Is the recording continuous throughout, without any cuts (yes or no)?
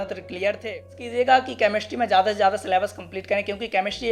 no